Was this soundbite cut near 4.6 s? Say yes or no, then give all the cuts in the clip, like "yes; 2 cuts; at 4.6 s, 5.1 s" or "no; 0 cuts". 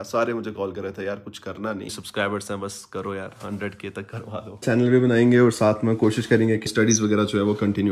yes; 3 cuts; at 1.9 s, 4.6 s, 6.7 s